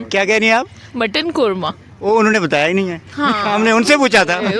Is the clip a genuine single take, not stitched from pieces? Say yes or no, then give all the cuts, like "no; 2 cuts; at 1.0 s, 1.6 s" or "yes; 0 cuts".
yes; 0 cuts